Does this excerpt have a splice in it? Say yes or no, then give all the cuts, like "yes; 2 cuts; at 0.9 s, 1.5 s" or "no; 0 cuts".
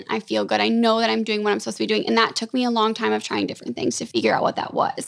yes; 1 cut; at 4.0 s